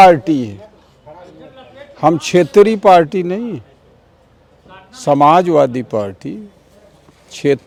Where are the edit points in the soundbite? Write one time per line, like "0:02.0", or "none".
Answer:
none